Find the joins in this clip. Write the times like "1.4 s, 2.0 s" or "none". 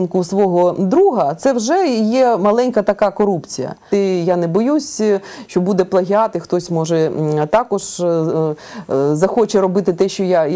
3.9 s